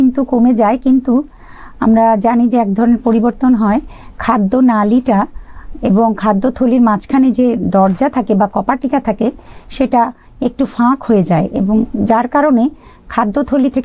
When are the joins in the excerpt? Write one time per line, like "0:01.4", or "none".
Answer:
none